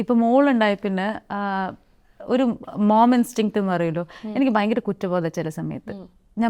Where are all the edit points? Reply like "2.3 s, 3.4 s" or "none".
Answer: none